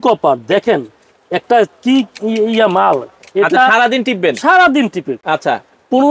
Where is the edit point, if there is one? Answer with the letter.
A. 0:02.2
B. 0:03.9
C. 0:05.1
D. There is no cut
D